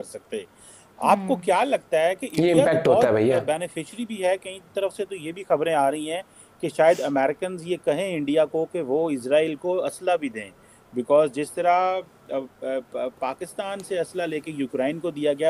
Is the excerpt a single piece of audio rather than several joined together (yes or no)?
yes